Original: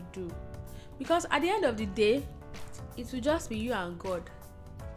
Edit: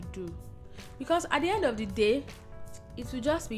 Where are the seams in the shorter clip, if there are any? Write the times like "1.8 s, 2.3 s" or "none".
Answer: none